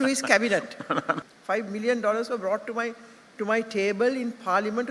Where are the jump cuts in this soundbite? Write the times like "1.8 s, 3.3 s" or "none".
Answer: 1.2 s